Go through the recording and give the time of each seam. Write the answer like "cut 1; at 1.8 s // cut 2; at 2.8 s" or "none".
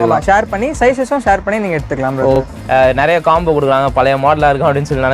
cut 1; at 2.5 s